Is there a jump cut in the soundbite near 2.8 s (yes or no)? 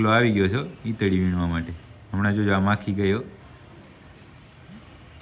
no